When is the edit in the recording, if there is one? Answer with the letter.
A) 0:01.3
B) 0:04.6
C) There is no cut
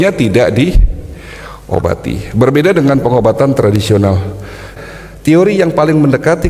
B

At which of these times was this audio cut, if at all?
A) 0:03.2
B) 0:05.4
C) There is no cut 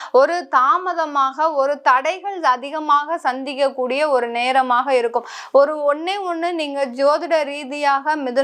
C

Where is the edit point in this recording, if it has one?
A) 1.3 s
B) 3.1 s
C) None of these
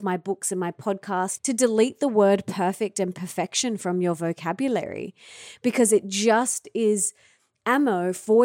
A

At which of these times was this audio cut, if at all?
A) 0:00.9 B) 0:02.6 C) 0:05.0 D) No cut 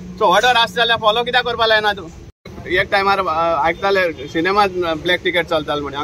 B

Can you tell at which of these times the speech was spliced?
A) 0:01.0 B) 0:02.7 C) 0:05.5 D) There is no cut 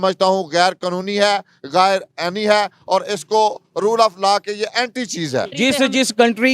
C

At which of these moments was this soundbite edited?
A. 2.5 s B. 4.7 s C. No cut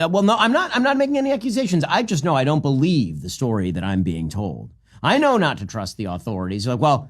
B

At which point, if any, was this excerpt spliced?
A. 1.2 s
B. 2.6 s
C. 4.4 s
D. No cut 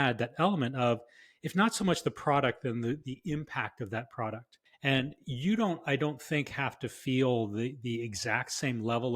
C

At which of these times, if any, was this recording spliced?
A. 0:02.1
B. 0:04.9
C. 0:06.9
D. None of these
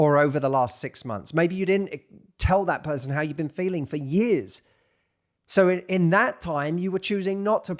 D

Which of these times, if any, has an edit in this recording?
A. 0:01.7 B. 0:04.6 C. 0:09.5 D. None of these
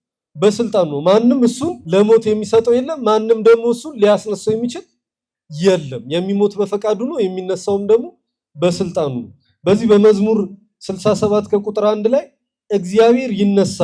A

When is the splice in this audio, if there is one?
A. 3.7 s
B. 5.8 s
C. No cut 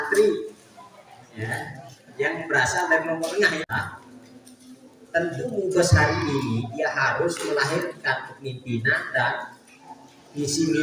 A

